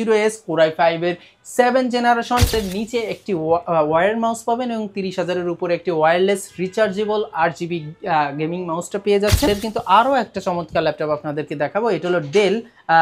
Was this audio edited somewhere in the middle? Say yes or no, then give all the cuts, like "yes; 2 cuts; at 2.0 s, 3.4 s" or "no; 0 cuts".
yes; 2 cuts; at 2.5 s, 9.5 s